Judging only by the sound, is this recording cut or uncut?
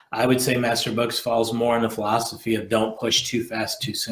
uncut